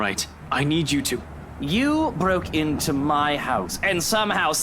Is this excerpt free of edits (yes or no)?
no